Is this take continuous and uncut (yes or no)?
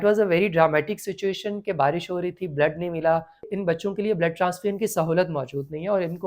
no